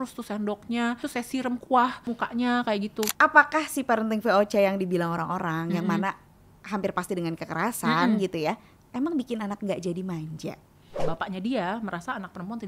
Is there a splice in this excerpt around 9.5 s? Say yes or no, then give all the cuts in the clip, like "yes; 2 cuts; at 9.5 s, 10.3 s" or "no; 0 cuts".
no; 4 cuts; at 1.1 s, 2.1 s, 3.1 s, 11.0 s